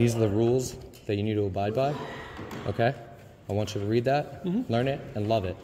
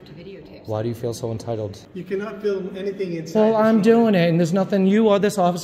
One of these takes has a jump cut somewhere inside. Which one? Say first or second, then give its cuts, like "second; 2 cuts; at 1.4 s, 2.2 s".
second; 1 cut; at 1.9 s